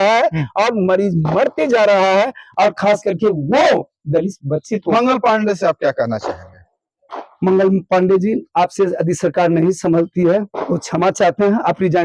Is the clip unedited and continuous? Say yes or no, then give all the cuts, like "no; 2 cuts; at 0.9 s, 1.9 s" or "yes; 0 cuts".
yes; 0 cuts